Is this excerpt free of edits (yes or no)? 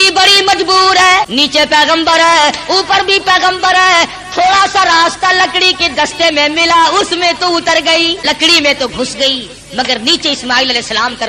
no